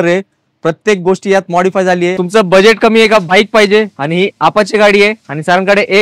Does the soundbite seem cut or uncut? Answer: cut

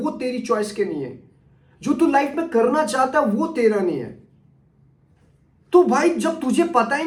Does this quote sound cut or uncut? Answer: uncut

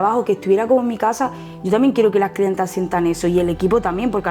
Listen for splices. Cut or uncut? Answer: uncut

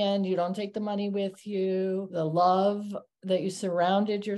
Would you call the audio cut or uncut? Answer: cut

